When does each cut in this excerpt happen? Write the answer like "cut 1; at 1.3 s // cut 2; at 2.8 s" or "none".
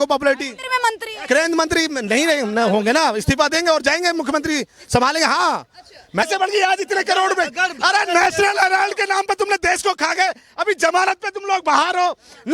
cut 1; at 6.2 s

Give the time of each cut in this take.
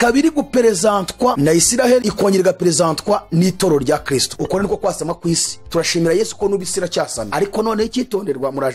cut 1; at 4.3 s // cut 2; at 7.2 s

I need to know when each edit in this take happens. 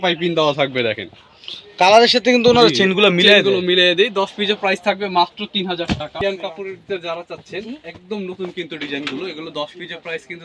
cut 1; at 6.2 s

